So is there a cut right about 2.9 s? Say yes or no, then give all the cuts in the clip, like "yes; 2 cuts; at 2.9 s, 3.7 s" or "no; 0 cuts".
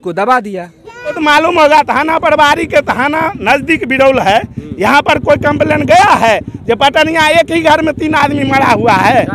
no; 1 cut; at 1.2 s